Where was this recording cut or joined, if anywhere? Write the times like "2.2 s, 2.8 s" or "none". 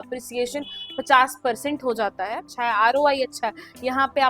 2.5 s